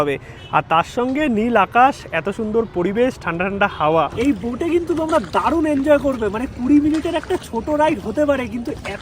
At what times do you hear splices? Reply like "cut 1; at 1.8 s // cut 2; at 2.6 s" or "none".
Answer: cut 1; at 4.1 s